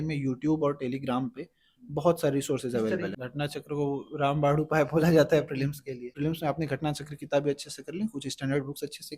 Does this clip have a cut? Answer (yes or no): yes